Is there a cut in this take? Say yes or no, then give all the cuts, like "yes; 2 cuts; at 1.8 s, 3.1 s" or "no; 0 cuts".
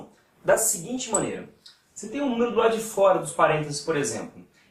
no; 0 cuts